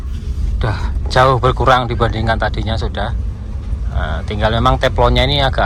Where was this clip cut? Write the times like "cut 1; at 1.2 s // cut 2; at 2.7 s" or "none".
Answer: none

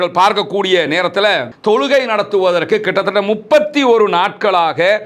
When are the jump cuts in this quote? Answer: cut 1; at 1.5 s

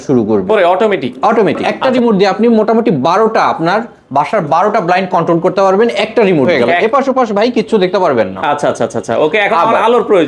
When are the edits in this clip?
cut 1; at 1.8 s // cut 2; at 6.5 s

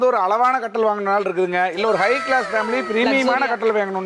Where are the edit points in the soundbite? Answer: none

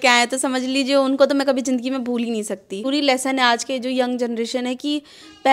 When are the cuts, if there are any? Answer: cut 1; at 2.9 s

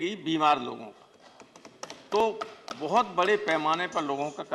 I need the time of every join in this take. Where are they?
none

